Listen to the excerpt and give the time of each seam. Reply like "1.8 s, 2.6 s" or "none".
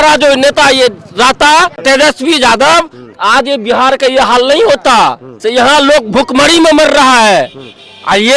1.8 s, 5.3 s